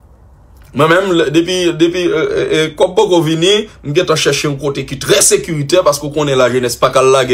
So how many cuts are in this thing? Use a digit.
1